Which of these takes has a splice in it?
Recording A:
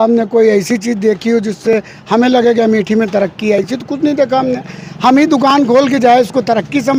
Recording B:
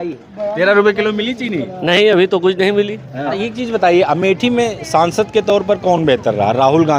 B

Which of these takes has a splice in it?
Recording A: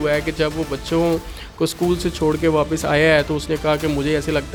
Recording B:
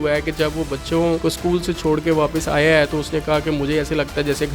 B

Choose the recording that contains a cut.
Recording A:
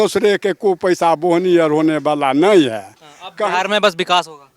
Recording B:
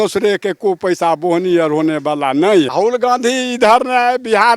B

